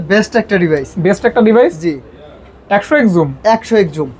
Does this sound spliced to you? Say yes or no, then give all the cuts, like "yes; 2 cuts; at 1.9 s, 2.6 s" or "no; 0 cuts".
no; 0 cuts